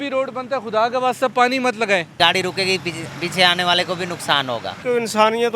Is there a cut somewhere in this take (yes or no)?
yes